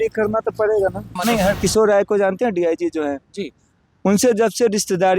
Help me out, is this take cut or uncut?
cut